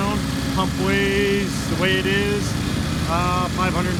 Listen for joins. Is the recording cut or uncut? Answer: uncut